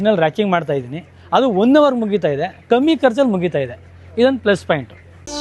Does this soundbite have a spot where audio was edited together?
no; 0 cuts

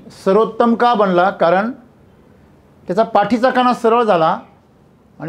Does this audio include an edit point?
no; 0 cuts

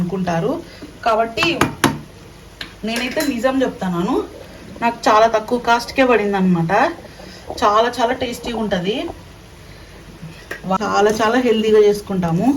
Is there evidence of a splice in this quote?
yes; 1 cut; at 10.8 s

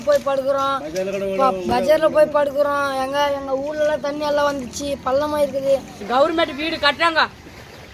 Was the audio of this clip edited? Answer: yes; 1 cut; at 6.0 s

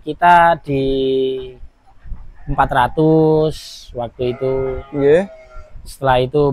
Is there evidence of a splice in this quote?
no; 0 cuts

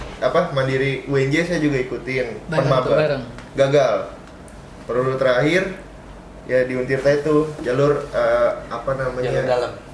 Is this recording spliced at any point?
no; 0 cuts

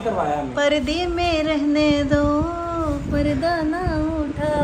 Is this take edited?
no; 0 cuts

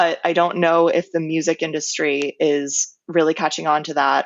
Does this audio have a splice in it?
no; 0 cuts

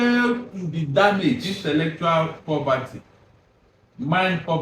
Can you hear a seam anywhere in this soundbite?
yes; 1 cut; at 1.5 s

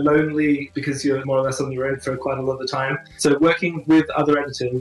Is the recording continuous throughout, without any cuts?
no; 2 cuts; at 1.0 s, 3.0 s

